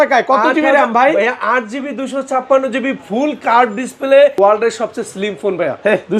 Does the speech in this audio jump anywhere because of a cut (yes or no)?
yes